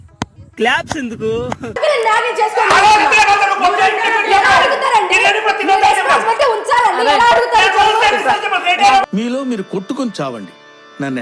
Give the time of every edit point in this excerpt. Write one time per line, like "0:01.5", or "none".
none